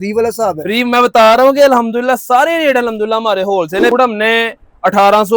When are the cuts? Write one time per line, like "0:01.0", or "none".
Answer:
0:03.9